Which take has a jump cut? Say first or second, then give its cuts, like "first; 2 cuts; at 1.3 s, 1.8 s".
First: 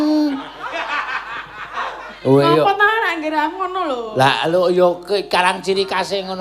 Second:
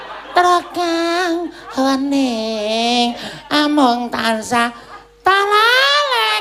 first; 1 cut; at 3.1 s